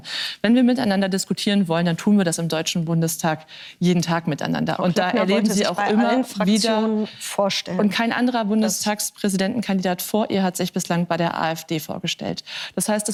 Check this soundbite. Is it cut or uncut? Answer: uncut